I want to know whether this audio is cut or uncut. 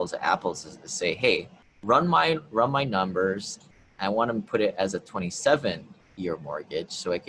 uncut